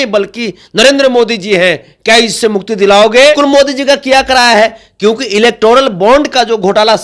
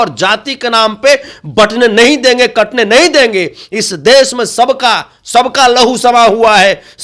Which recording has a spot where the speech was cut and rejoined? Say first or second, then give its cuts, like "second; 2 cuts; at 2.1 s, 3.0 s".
first; 1 cut; at 3.4 s